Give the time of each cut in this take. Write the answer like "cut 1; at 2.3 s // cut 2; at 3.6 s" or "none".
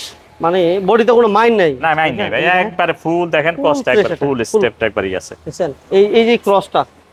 none